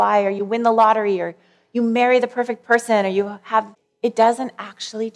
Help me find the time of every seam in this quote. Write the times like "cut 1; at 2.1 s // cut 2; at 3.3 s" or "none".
cut 1; at 3.8 s